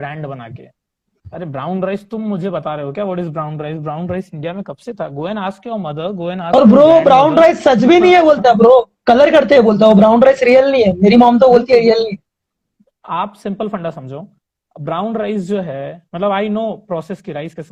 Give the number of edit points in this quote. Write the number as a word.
zero